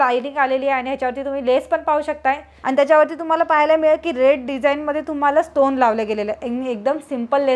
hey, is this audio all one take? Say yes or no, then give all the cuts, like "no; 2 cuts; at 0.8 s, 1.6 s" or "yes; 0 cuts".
no; 1 cut; at 2.5 s